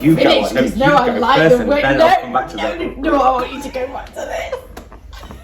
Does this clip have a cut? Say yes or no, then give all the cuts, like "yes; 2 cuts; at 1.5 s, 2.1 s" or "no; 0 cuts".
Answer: no; 0 cuts